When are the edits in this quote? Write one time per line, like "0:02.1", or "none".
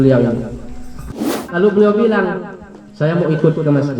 0:01.2